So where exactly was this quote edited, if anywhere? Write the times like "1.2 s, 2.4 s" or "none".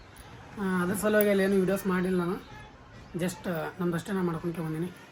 none